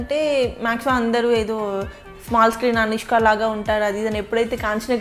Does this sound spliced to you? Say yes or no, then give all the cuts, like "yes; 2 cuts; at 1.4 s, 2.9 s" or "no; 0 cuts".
no; 0 cuts